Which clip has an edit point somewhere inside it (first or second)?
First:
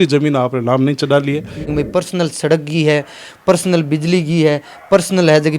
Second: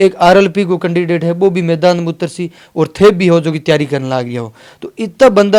first